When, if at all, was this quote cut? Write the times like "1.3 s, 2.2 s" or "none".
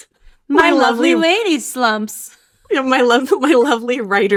none